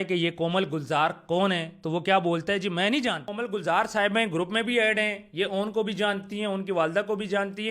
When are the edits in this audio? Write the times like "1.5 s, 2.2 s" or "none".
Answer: 3.2 s